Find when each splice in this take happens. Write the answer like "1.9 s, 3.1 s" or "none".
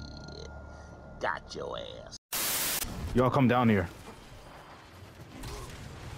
2.9 s